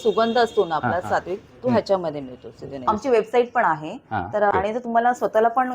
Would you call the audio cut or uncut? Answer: cut